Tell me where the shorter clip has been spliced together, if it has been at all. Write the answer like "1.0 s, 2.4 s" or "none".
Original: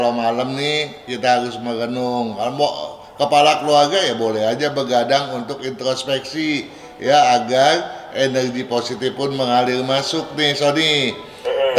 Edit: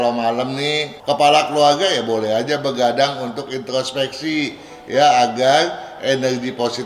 0.9 s